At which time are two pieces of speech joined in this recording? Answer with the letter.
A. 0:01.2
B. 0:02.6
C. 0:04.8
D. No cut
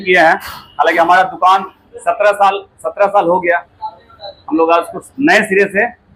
D